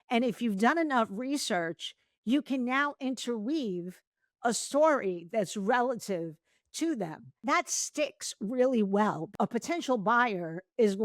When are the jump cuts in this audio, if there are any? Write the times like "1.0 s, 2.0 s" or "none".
7.4 s, 9.2 s